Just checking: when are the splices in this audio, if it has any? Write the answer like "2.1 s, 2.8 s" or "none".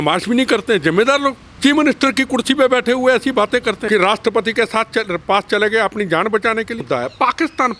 1.5 s, 3.8 s, 6.8 s